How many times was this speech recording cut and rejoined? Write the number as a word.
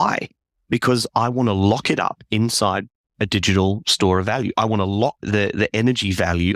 one